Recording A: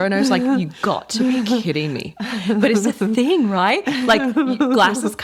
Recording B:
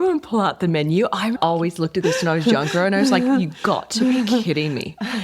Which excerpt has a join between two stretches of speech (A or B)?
B